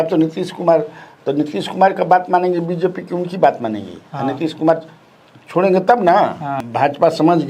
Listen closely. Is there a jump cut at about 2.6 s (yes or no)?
no